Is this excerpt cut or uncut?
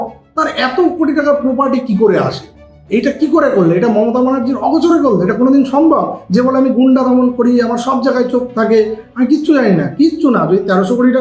uncut